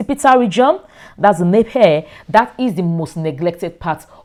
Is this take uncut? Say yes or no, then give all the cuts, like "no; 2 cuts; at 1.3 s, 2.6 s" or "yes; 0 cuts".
yes; 0 cuts